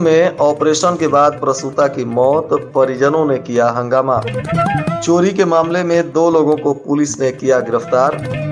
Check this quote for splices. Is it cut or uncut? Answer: uncut